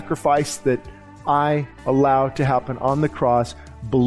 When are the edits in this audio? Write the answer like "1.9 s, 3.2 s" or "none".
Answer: 1.7 s